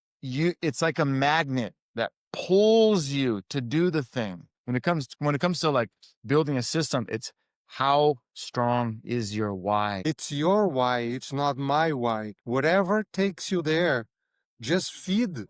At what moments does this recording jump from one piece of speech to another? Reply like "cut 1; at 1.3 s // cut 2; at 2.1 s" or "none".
cut 1; at 4.5 s // cut 2; at 10.0 s // cut 3; at 12.3 s